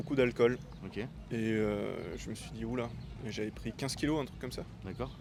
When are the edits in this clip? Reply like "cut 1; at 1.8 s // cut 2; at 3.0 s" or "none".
none